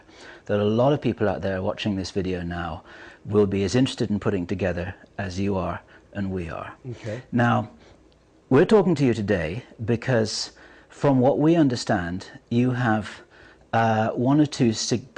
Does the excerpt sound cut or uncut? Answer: uncut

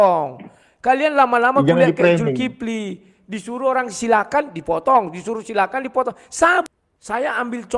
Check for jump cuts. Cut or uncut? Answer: cut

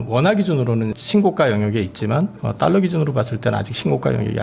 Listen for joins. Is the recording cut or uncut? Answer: cut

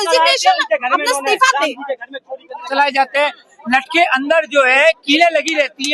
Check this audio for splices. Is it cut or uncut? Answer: cut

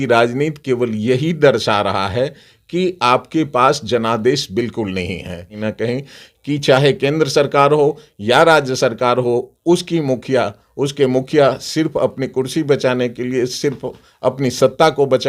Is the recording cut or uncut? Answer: cut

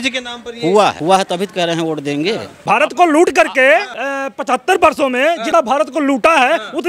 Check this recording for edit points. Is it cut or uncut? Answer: cut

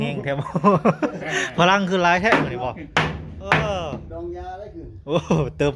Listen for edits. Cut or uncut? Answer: uncut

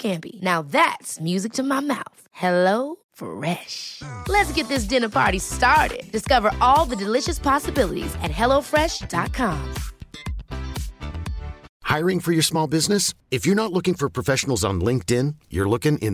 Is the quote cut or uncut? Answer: cut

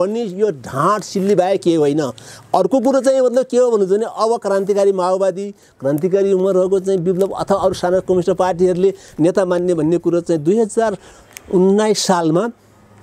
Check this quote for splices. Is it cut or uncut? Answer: uncut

